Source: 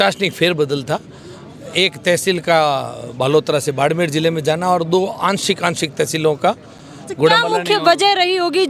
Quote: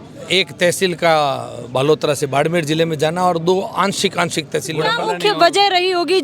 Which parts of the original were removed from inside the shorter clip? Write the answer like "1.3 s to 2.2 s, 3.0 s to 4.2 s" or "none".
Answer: 6.1 s to 7.1 s

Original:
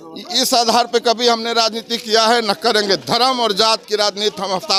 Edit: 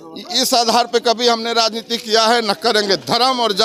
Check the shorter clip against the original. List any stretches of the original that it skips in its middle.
none

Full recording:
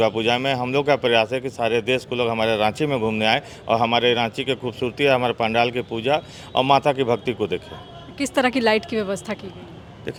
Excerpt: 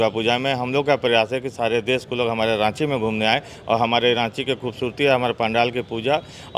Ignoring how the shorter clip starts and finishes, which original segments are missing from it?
none

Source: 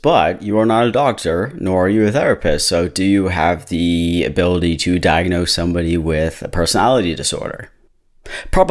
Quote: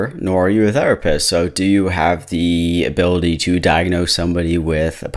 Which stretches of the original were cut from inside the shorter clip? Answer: none

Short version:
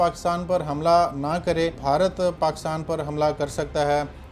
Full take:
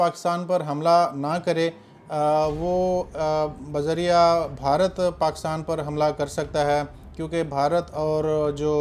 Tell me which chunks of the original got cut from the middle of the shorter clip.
1.8 s to 4.6 s

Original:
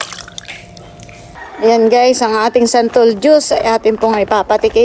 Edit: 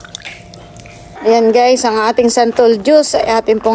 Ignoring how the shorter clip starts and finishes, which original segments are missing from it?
1.4 s to 1.5 s

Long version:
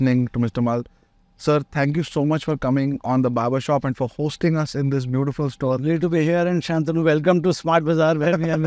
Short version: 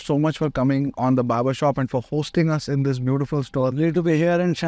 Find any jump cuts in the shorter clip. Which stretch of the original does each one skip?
none

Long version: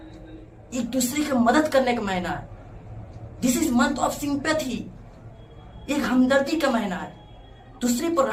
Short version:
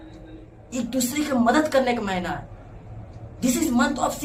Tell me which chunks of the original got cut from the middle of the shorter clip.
none

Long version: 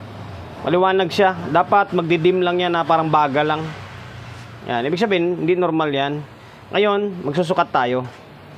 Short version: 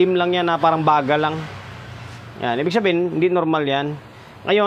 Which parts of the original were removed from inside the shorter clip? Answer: none

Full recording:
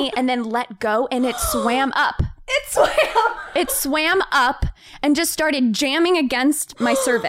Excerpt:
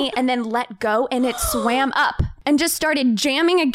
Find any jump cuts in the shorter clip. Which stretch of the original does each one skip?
2.3 s to 4.8 s

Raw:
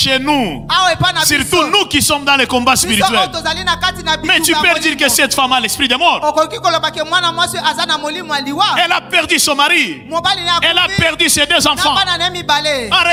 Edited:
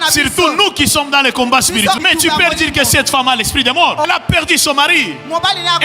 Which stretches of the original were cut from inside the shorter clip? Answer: 3.1 s to 4.2 s, 6.3 s to 8.9 s

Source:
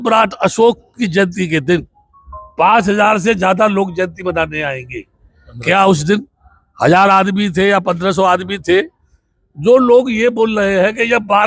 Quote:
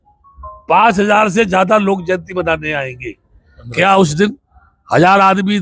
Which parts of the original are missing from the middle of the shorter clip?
none

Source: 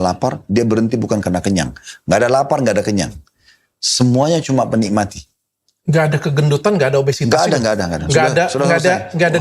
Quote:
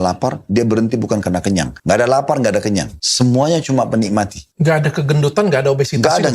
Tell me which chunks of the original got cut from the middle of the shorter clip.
1.7 s to 2.0 s, 3.2 s to 3.8 s, 5.2 s to 5.7 s

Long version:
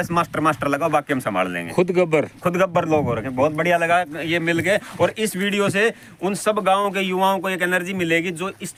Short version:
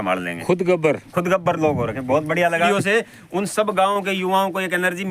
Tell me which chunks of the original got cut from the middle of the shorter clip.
4.0 s to 5.6 s

